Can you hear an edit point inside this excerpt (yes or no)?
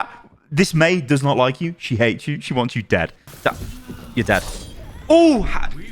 yes